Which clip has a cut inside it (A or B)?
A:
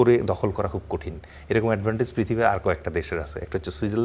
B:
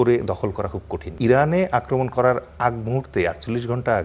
B